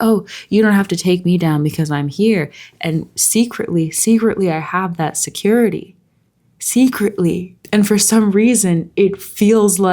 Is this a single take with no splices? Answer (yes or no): no